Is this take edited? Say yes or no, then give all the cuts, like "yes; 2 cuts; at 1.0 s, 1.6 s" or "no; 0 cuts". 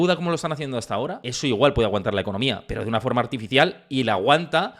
yes; 1 cut; at 1.2 s